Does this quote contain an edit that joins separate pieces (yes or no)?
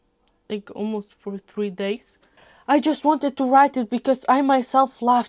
yes